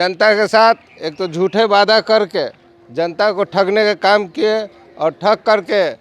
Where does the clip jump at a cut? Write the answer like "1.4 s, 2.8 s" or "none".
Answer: none